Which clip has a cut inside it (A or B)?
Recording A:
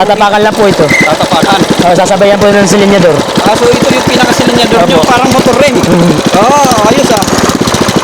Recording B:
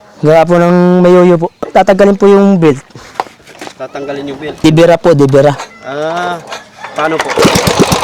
B